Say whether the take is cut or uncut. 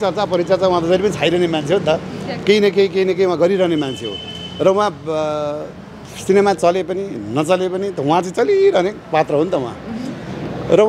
uncut